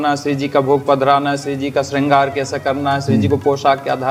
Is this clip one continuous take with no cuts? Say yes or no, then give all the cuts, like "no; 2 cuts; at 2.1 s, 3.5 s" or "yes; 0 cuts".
yes; 0 cuts